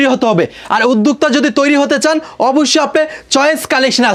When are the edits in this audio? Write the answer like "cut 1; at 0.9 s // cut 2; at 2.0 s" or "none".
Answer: none